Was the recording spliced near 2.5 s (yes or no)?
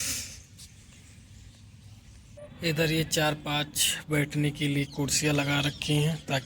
yes